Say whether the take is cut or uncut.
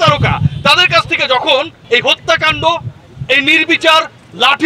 cut